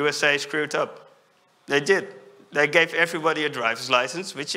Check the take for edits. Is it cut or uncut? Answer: uncut